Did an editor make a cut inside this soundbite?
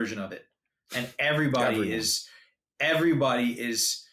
no; 0 cuts

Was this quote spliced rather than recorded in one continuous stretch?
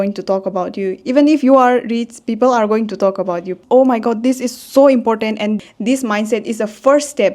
yes; 2 cuts; at 3.6 s, 5.6 s

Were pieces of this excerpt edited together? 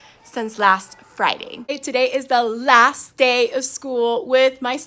yes; 1 cut; at 1.8 s

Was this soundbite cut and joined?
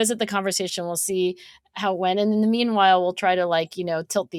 no; 0 cuts

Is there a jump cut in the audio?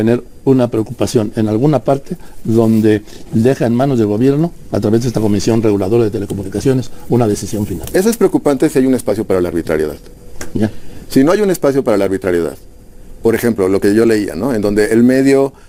no; 0 cuts

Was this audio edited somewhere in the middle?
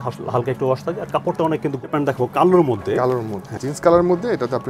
yes; 2 cuts; at 1.8 s, 3.6 s

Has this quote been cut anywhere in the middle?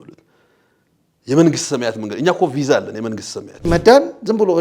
yes; 1 cut; at 3.7 s

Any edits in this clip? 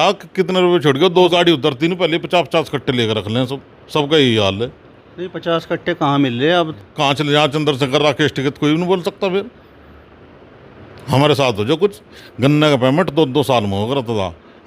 yes; 3 cuts; at 1.3 s, 6.7 s, 12.1 s

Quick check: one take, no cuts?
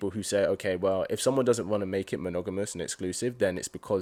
yes; 0 cuts

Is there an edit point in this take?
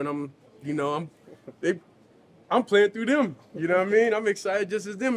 no; 0 cuts

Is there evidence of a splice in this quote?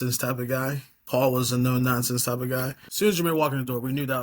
yes; 1 cut; at 2.8 s

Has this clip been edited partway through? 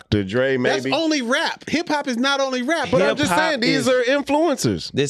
no; 0 cuts

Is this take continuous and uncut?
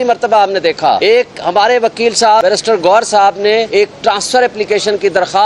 no; 3 cuts; at 1.0 s, 2.4 s, 3.7 s

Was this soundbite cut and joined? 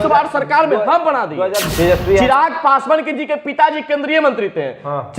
yes; 1 cut; at 1.6 s

